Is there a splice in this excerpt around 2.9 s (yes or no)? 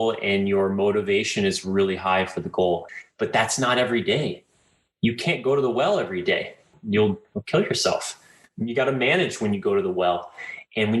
yes